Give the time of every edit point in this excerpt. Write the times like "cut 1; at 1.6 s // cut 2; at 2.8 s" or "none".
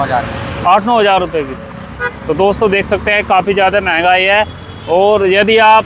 none